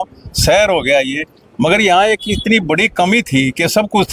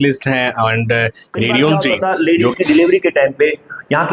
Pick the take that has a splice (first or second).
second